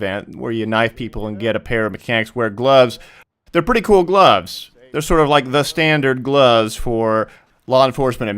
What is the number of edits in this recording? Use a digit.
1